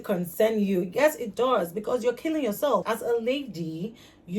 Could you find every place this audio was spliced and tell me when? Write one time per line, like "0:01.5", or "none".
0:02.8